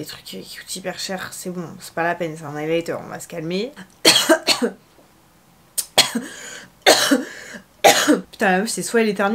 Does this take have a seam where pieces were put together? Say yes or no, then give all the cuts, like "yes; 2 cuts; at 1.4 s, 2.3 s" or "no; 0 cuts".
yes; 2 cuts; at 3.8 s, 8.3 s